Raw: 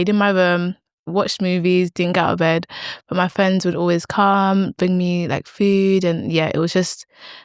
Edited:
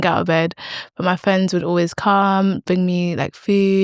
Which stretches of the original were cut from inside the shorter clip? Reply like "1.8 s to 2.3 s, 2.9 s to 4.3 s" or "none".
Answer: none